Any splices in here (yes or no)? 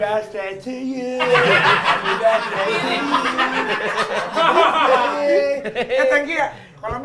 no